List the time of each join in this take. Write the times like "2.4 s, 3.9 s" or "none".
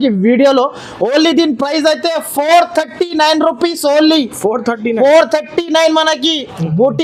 none